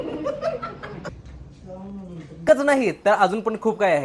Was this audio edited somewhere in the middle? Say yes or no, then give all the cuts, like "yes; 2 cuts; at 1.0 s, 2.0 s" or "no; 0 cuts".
yes; 1 cut; at 2.4 s